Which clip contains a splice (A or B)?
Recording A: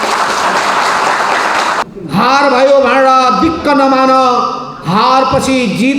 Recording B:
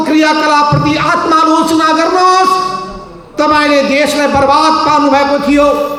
A